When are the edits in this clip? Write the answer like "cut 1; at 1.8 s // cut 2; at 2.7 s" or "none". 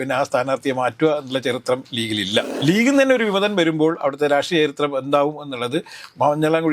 cut 1; at 2.5 s